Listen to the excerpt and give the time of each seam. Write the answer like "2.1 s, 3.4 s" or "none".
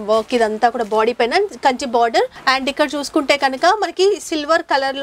2.4 s

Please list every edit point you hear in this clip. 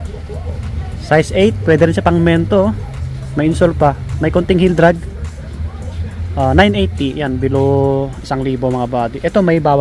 none

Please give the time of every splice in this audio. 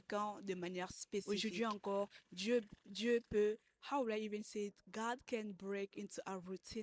1.2 s

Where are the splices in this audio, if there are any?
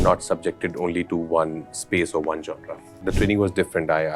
2.9 s

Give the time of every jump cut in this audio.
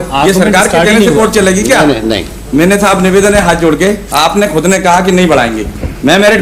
none

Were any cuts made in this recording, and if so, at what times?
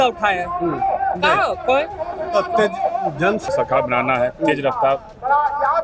3.5 s

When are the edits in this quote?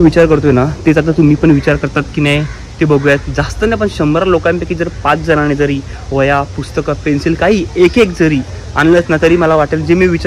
none

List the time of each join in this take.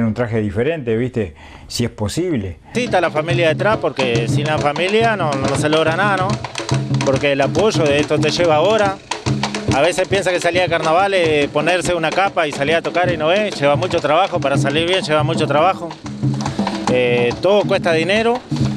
2.7 s

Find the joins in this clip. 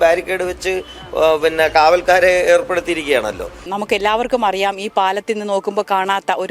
3.7 s

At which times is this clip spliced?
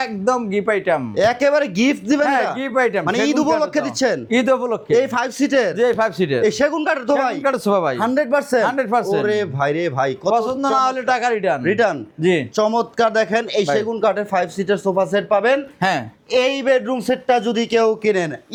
none

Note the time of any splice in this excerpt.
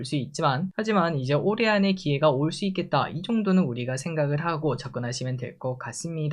none

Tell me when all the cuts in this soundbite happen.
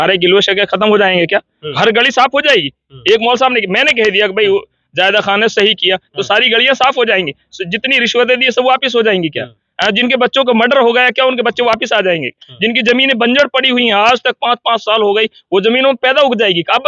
none

